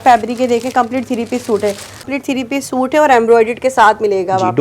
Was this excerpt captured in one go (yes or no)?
no